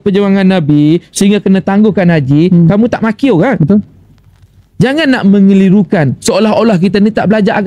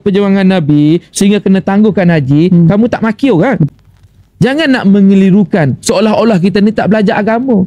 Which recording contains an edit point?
second; 1 cut; at 3.6 s

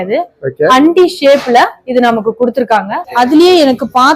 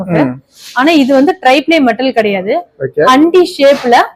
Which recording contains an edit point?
first; 1 cut; at 3.1 s

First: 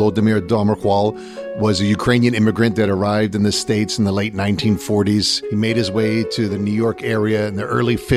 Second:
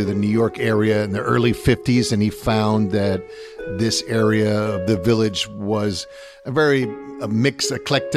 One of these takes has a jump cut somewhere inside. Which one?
first; 1 cut; at 5.4 s

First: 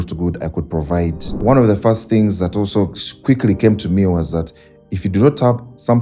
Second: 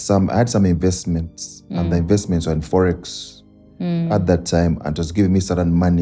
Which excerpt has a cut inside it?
first; 1 cut; at 1.3 s

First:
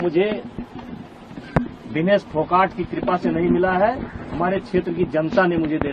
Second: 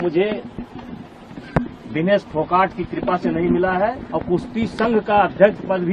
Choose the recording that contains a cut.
second; 1 cut; at 4.1 s

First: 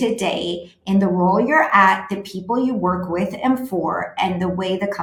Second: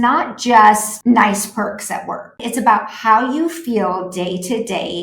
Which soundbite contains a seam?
second; 2 cuts; at 0.9 s, 2.4 s

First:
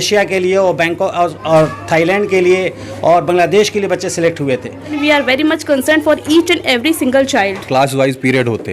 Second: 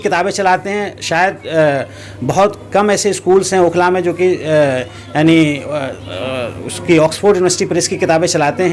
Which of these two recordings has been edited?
first; 2 cuts; at 5.0 s, 7.6 s

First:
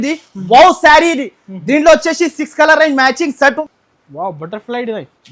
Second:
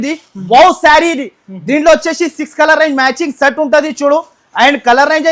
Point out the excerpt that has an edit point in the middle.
first; 1 cut; at 3.6 s

